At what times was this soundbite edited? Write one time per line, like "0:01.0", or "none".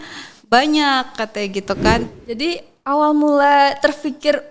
0:02.1